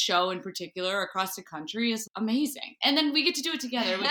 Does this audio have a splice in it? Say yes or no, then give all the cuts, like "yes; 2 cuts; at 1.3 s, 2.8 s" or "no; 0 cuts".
no; 0 cuts